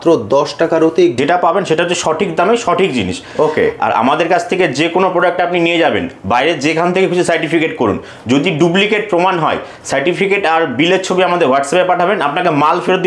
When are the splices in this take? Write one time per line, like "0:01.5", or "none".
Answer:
0:01.1